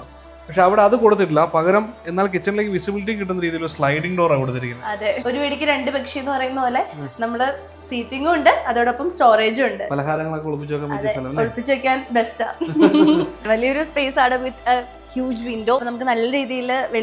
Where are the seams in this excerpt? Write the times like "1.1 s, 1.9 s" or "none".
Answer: 5.3 s, 13.4 s, 15.8 s